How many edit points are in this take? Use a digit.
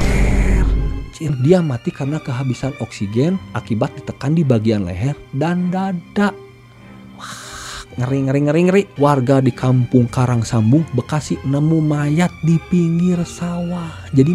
2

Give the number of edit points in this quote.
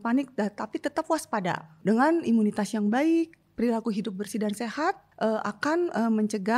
2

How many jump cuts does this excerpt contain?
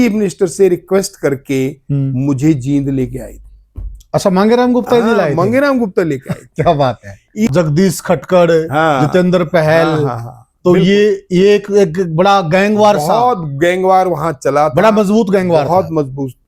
1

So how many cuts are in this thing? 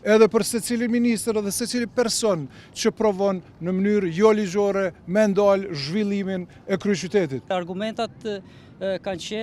1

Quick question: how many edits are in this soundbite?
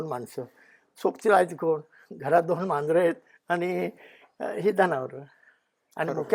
0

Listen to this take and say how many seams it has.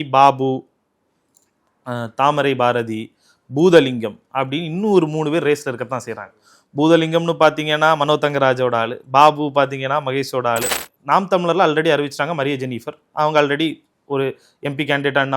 1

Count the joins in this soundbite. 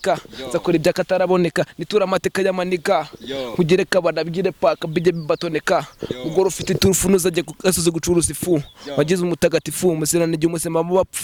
0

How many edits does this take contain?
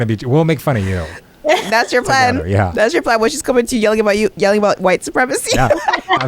1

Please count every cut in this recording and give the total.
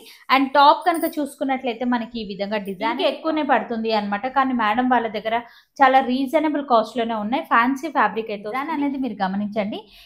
2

